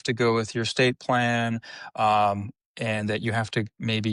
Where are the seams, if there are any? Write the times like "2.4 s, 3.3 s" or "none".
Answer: none